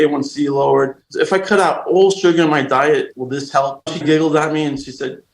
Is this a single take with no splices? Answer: no; 2 cuts; at 1.0 s, 3.9 s

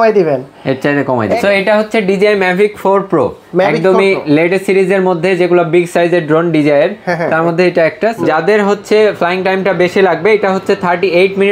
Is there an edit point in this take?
yes; 2 cuts; at 1.4 s, 8.2 s

